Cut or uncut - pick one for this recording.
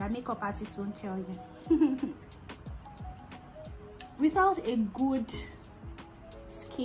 uncut